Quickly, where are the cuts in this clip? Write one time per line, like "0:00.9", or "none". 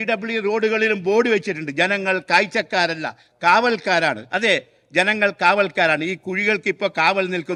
none